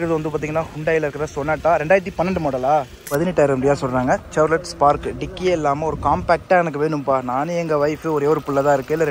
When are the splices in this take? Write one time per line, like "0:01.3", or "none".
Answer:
0:03.0